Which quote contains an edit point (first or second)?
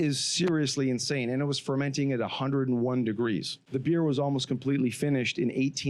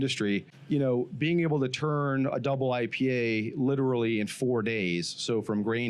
first